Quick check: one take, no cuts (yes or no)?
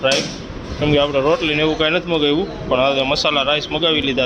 yes